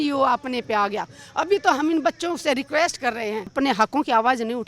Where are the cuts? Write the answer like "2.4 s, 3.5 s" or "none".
3.5 s